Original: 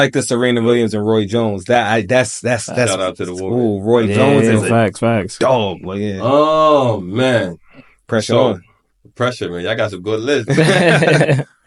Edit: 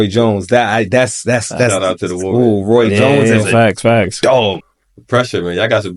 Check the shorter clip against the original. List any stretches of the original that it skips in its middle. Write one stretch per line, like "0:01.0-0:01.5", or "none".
0:05.9-0:08.8